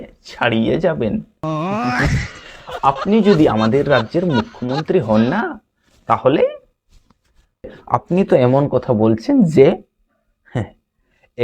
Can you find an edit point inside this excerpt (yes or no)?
yes